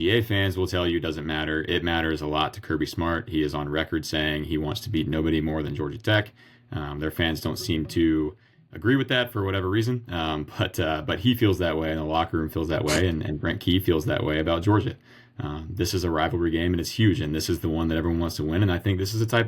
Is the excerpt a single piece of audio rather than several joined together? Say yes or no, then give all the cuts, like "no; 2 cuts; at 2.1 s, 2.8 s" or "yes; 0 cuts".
yes; 0 cuts